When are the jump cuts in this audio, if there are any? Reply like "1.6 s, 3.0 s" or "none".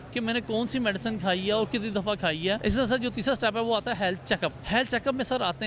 2.6 s, 4.6 s

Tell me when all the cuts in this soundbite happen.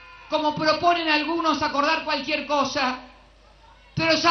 none

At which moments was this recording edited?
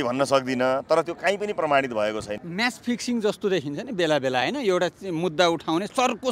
2.4 s

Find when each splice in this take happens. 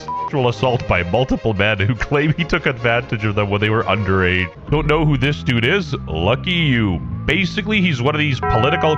4.6 s

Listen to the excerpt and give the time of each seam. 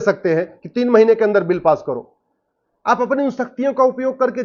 none

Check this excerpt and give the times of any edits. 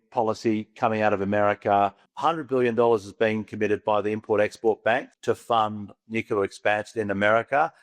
2.0 s, 5.1 s

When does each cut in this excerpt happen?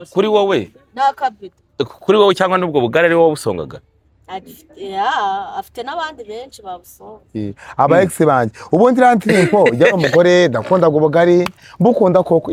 none

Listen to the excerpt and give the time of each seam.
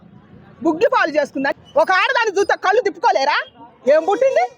1.5 s

